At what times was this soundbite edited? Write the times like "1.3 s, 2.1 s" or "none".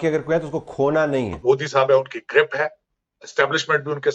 1.4 s